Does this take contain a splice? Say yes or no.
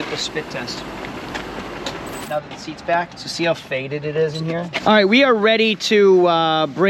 yes